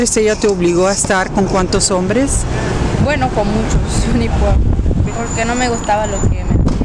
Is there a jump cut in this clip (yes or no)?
yes